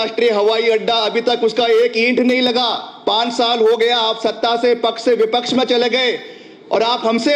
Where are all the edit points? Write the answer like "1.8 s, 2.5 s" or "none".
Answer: none